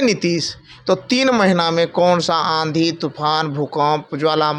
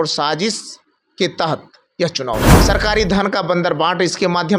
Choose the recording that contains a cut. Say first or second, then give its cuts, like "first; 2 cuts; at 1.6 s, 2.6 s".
second; 1 cut; at 2.6 s